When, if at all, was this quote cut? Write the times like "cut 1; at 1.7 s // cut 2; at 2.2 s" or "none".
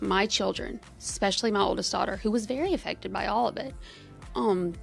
none